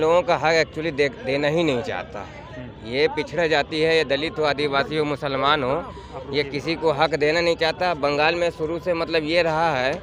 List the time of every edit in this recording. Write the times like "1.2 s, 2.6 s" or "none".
none